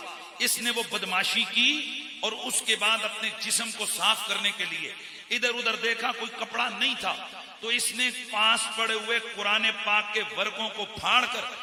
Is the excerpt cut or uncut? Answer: uncut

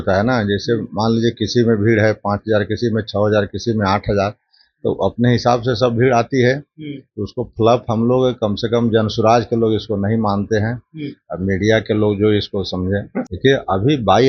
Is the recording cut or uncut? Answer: cut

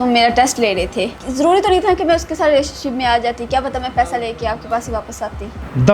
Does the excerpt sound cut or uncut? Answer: cut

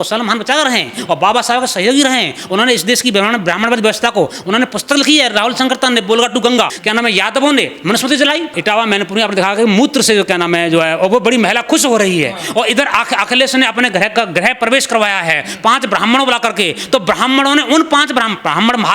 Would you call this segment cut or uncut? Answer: cut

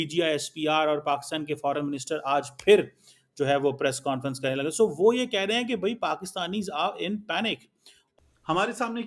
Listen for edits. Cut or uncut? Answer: cut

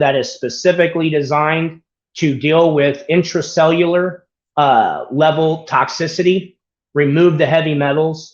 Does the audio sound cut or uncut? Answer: uncut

